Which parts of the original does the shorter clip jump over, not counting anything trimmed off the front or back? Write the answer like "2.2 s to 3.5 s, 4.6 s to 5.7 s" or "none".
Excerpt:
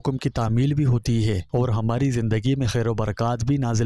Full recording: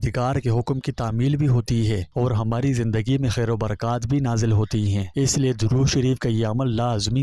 none